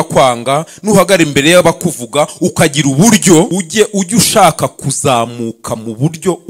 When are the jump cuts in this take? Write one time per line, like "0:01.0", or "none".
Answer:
0:03.5